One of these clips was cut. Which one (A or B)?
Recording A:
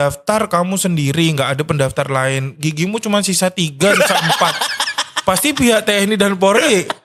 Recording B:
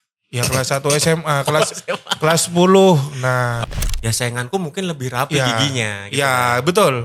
B